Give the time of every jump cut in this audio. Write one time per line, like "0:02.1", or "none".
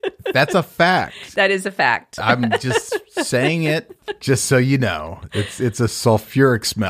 none

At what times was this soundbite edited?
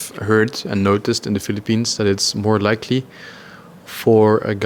none

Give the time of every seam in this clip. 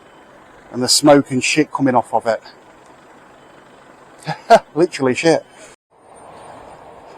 0:06.1

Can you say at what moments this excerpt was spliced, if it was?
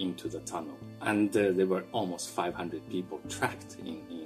0:00.9
0:01.9

